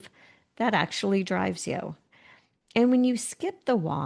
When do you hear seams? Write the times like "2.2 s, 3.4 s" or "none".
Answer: none